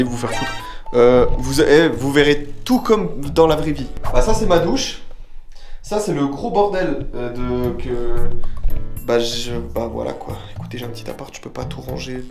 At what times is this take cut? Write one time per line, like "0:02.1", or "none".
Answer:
none